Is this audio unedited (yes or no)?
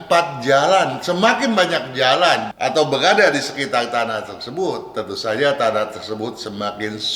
no